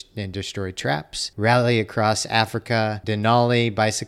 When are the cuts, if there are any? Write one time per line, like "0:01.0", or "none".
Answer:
0:01.2
0:03.0